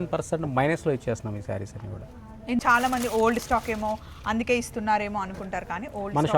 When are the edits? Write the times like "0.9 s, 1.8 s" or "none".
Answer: 2.6 s